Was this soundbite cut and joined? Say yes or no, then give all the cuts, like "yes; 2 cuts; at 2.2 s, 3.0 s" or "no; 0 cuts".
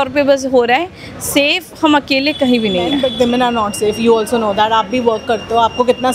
yes; 1 cut; at 2.9 s